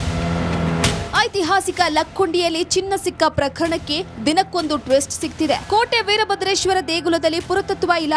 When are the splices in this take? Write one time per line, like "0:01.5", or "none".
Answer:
0:00.9